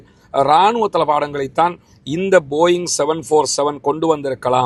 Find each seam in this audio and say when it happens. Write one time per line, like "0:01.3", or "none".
none